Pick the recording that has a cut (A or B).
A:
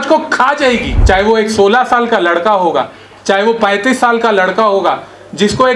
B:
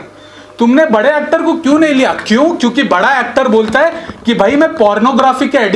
A